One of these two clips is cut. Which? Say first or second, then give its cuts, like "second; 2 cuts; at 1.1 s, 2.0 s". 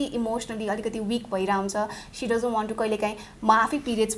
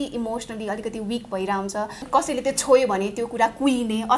second; 1 cut; at 2.1 s